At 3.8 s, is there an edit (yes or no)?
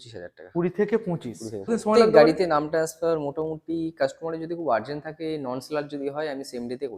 no